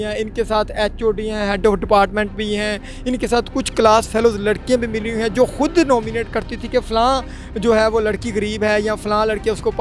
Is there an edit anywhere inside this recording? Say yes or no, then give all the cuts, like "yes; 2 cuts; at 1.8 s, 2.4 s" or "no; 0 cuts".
no; 0 cuts